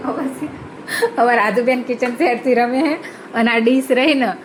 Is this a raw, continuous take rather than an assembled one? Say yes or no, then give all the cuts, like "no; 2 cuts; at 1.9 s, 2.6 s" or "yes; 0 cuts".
yes; 0 cuts